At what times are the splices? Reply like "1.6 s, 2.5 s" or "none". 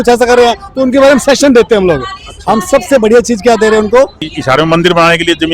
4.3 s